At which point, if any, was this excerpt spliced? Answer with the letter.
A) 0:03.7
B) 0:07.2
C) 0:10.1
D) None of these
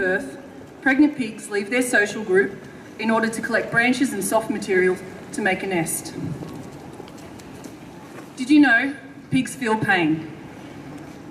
A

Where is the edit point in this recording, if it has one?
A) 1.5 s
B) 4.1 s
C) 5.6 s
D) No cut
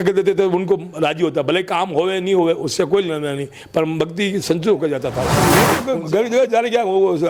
C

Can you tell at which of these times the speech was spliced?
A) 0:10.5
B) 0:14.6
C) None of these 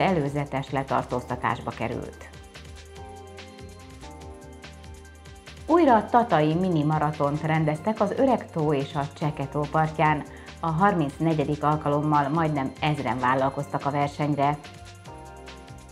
B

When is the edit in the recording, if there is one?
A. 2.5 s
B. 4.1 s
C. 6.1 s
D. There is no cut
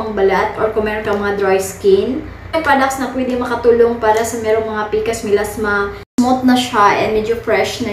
C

